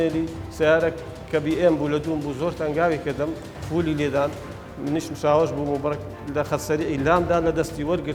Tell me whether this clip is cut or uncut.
uncut